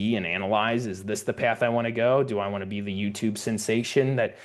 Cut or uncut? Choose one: uncut